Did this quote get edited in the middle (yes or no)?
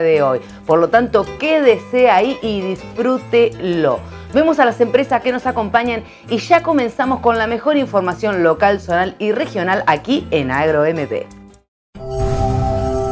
yes